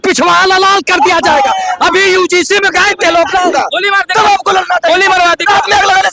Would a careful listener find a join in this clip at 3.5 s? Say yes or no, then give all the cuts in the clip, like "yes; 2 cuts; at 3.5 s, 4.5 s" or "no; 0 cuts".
yes; 1 cut; at 3.5 s